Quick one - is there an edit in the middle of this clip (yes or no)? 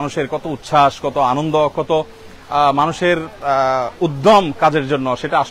no